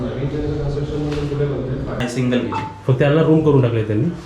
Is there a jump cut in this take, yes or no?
yes